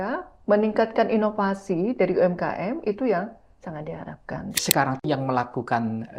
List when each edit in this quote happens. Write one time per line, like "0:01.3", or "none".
0:04.6

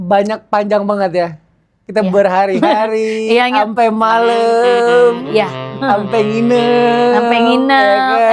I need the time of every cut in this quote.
none

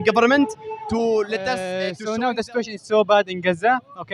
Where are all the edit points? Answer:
0:02.0

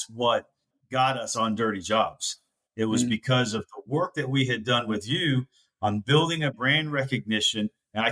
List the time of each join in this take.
0:01.0

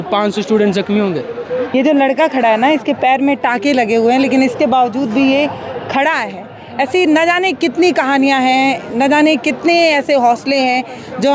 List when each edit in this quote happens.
0:01.7

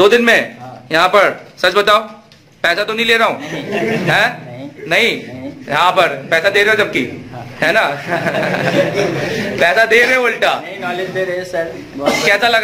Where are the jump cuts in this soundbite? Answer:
none

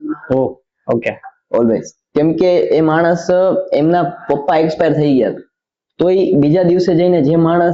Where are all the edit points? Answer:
none

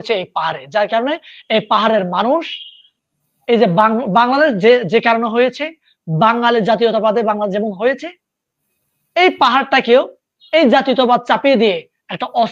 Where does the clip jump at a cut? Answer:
none

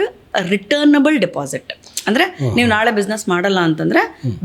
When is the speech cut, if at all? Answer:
none

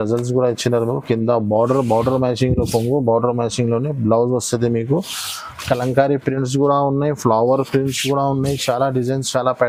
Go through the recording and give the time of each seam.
none

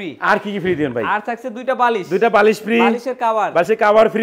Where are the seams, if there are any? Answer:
none

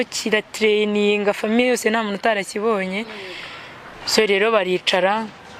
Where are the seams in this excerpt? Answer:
none

